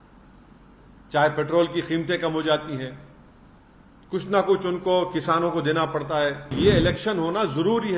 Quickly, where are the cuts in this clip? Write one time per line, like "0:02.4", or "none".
0:06.5